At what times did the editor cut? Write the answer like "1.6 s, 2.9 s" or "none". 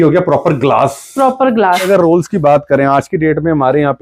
1.9 s